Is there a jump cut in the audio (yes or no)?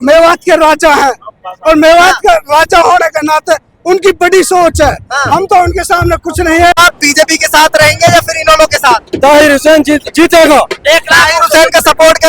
yes